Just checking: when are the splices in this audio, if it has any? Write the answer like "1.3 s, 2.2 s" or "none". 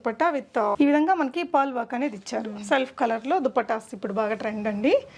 none